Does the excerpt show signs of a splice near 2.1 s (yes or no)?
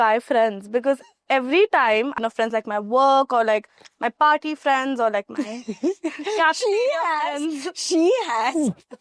yes